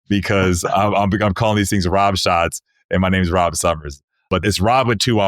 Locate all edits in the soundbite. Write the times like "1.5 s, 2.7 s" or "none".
4.4 s